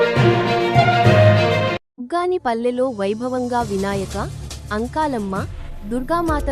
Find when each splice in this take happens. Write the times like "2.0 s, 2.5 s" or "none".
1.8 s